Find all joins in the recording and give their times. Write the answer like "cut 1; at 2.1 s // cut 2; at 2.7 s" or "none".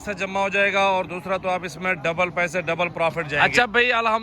cut 1; at 3.3 s